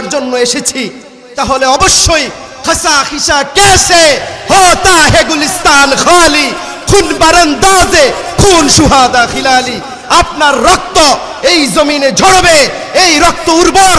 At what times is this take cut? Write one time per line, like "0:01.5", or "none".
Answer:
none